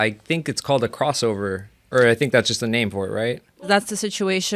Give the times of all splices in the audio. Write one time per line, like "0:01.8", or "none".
0:03.5